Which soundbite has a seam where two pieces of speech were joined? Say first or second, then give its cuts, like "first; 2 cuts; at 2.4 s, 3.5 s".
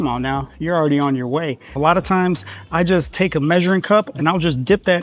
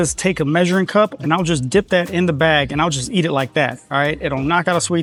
first; 1 cut; at 1.8 s